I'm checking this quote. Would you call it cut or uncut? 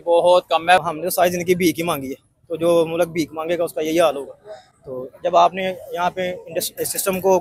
cut